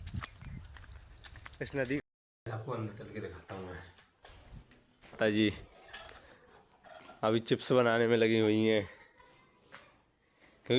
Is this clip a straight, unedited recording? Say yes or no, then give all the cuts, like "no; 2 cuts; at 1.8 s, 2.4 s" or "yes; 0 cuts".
no; 2 cuts; at 2.0 s, 5.1 s